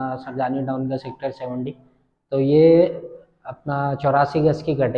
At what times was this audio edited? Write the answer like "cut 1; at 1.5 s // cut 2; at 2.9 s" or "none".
none